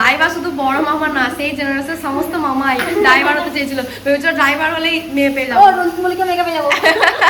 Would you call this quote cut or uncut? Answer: uncut